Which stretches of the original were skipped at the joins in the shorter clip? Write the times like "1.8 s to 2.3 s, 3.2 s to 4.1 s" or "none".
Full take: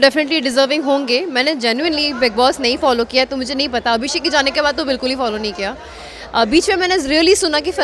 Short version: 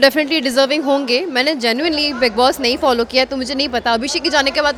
none